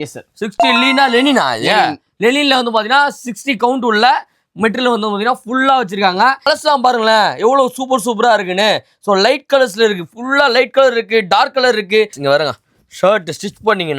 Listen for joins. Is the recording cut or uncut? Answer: cut